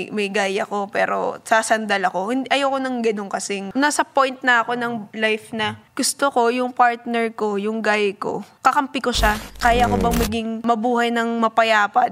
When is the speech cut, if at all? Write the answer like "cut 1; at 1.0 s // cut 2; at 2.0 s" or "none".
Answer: cut 1; at 3.6 s // cut 2; at 5.1 s // cut 3; at 5.8 s // cut 4; at 8.5 s // cut 5; at 9.5 s // cut 6; at 10.6 s